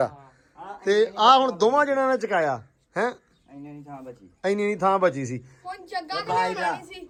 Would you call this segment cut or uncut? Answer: uncut